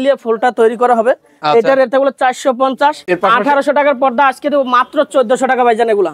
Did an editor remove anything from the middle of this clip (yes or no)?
yes